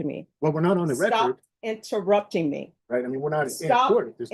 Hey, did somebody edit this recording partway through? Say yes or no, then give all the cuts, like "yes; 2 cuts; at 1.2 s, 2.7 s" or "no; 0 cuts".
yes; 1 cut; at 2.7 s